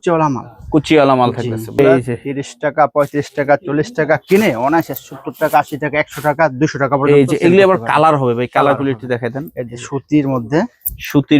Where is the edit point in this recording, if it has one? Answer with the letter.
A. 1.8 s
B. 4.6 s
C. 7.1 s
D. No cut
A